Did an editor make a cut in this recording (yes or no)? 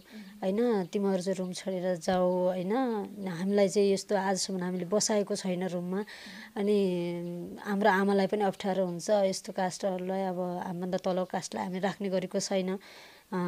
no